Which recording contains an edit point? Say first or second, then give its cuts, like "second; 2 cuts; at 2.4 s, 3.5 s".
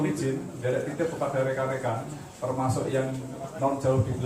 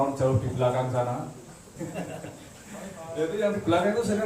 second; 1 cut; at 1.8 s